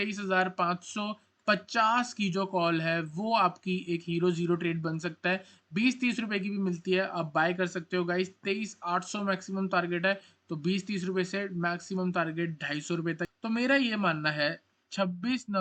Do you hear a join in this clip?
yes; 1 cut; at 13.3 s

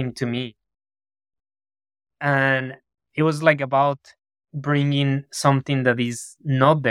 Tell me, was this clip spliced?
no; 0 cuts

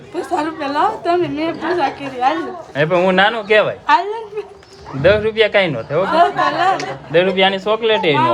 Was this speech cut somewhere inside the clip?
no; 0 cuts

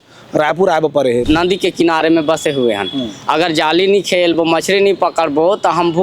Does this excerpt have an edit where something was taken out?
yes; 1 cut; at 1.2 s

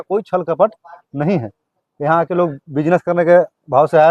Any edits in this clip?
no; 0 cuts

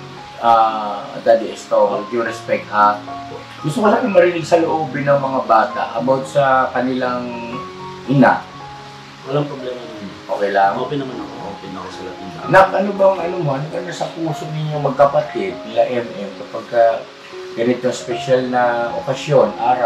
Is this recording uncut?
yes; 0 cuts

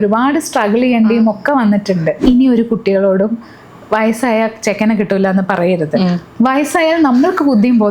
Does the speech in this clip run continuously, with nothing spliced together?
no; 1 cut; at 2.1 s

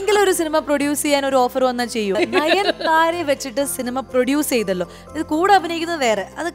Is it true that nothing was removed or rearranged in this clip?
no; 1 cut; at 2.2 s

